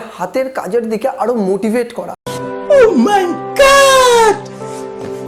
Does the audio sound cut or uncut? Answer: uncut